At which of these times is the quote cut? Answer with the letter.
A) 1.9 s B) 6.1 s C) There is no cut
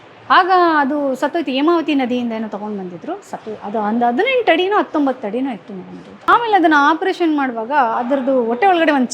B